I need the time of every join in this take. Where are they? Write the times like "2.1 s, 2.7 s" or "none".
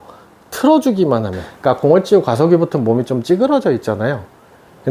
1.4 s

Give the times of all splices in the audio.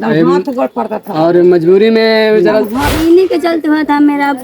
3.0 s

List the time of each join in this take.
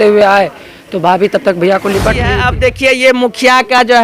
2.3 s

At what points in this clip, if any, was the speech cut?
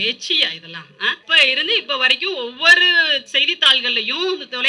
1.2 s

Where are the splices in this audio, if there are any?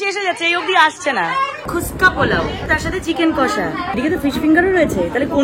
1.7 s, 2.7 s, 4.0 s

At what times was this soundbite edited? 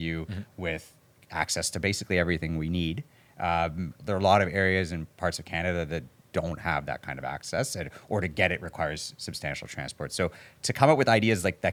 none

